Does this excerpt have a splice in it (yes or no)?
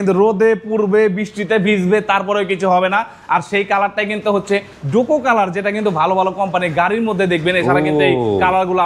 no